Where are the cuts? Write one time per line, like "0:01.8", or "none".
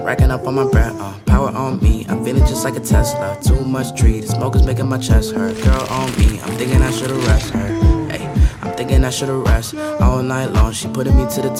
none